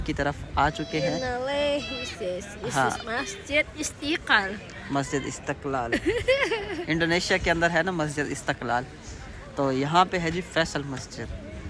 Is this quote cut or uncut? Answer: uncut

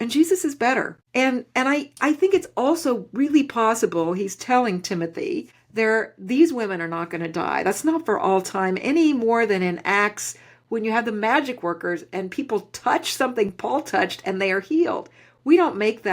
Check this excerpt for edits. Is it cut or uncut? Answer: cut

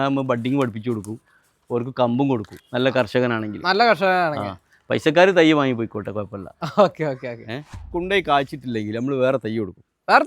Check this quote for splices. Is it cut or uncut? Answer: cut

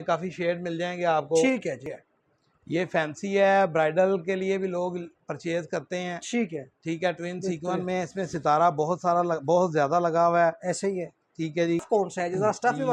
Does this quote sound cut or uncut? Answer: cut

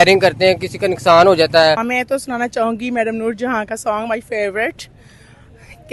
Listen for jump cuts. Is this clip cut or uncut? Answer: cut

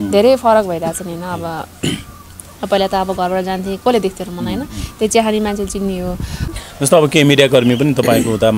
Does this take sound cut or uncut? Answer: cut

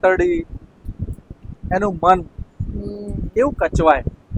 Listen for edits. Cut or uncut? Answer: uncut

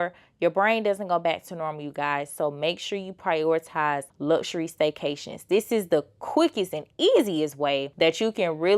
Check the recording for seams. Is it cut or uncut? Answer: cut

